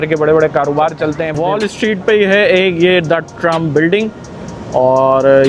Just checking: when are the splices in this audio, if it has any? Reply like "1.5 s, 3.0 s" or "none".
1.3 s

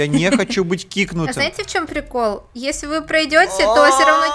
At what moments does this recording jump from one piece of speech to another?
none

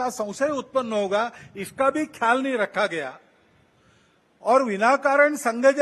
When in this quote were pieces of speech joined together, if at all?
none

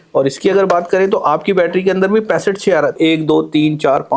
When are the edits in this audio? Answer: 3.0 s

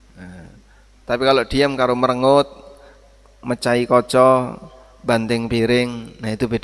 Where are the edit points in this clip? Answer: none

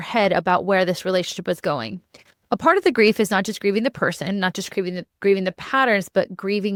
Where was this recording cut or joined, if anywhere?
none

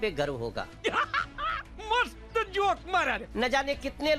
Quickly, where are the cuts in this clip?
3.3 s

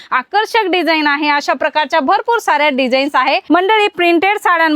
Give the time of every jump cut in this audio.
3.4 s

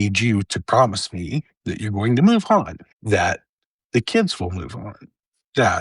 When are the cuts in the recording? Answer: none

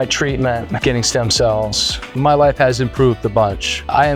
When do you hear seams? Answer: none

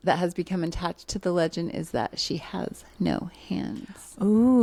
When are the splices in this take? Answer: none

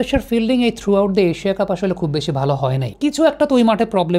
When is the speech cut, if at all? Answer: 2.9 s

